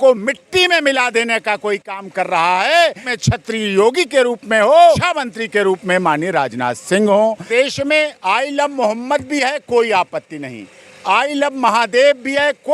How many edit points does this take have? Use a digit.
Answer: 3